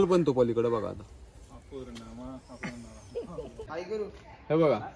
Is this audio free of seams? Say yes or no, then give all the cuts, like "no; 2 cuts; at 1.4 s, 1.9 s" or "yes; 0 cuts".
no; 1 cut; at 3.7 s